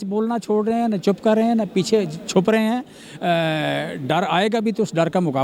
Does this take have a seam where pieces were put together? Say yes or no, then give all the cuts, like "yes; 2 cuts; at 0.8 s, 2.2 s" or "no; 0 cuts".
no; 0 cuts